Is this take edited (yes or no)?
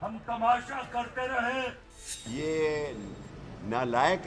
yes